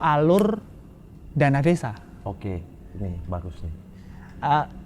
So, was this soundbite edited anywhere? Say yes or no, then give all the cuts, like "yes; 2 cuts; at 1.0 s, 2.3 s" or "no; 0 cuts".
no; 0 cuts